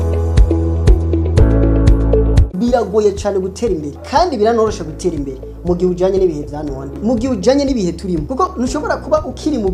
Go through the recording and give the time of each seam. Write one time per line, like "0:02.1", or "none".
none